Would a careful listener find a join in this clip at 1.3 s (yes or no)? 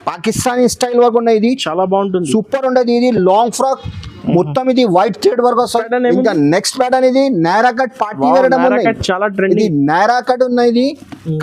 no